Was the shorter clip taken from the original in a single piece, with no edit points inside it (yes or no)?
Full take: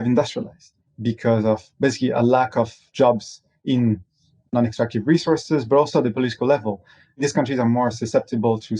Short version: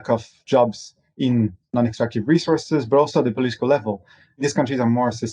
no